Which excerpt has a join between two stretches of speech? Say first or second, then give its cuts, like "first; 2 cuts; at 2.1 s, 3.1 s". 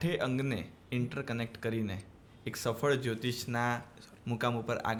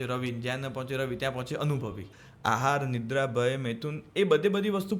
second; 1 cut; at 2.1 s